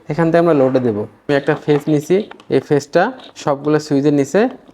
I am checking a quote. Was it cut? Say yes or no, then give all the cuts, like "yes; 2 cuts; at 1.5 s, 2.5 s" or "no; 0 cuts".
yes; 1 cut; at 1.3 s